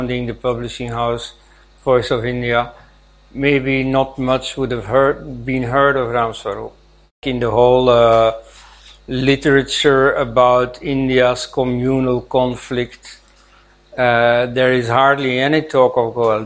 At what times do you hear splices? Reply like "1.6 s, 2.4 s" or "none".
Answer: 7.2 s